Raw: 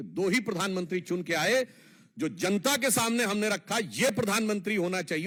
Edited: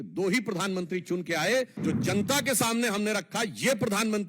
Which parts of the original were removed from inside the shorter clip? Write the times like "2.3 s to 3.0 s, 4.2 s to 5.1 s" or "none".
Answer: 1.8 s to 2.1 s